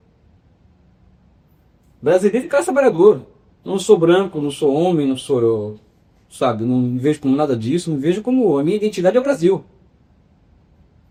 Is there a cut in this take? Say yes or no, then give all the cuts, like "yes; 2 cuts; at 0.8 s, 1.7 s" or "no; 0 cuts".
no; 0 cuts